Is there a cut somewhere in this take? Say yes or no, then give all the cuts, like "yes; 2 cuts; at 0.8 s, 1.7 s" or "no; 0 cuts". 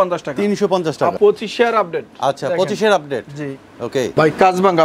yes; 2 cuts; at 1.2 s, 4.1 s